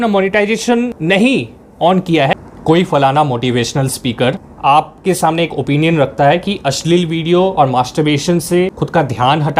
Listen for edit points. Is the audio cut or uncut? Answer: cut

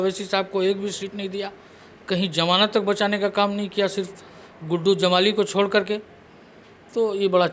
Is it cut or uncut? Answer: uncut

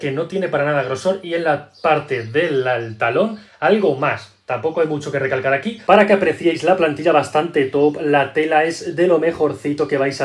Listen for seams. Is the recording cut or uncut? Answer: cut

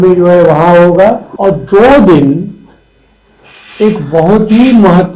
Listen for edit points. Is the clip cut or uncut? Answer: cut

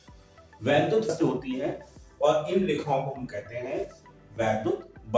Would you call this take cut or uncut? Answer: cut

